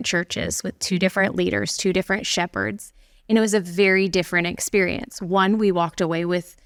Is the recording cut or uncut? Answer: uncut